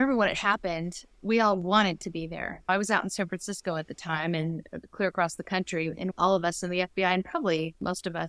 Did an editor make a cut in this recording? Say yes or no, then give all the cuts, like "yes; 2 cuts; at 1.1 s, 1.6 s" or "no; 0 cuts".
yes; 3 cuts; at 1.1 s, 2.7 s, 6.0 s